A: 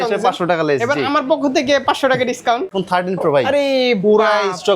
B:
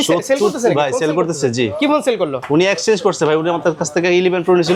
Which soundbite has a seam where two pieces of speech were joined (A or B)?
A